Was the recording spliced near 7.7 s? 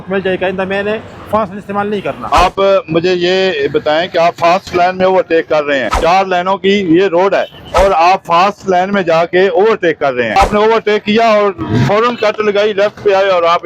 yes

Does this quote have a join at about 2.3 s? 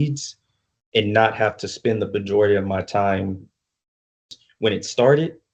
no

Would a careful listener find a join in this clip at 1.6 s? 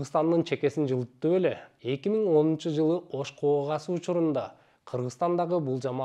yes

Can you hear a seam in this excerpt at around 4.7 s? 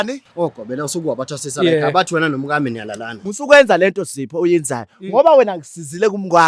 no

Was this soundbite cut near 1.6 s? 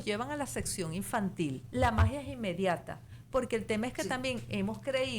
yes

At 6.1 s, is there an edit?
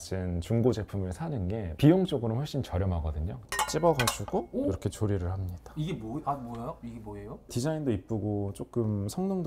no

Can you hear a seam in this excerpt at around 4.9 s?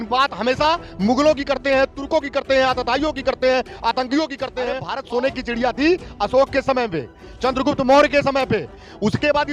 yes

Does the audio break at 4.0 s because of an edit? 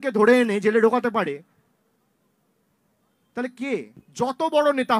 yes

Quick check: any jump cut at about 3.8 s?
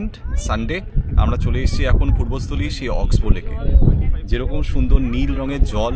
no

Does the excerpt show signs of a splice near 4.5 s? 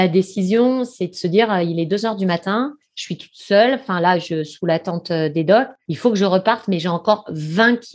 no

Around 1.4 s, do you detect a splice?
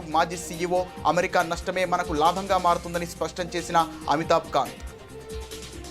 no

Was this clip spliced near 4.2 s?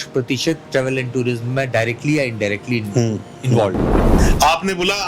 yes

